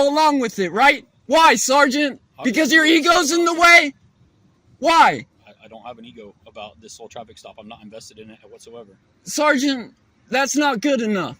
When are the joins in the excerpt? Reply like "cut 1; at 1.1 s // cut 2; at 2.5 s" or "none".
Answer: cut 1; at 1.1 s